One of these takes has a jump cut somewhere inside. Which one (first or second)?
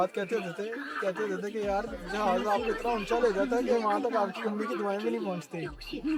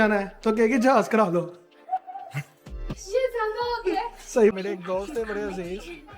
second